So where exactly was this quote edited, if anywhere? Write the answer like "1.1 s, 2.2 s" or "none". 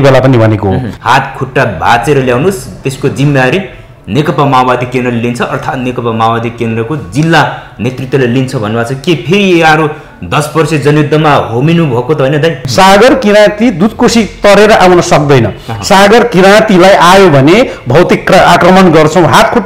0.9 s, 12.6 s

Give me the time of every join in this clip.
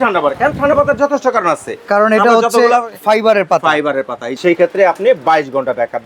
4.3 s

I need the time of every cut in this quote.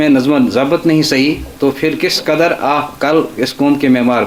none

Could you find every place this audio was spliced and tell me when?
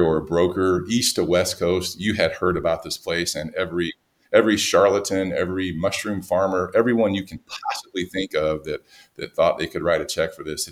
none

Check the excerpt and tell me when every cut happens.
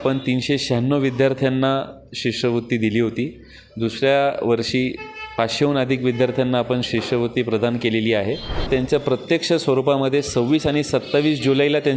8.7 s

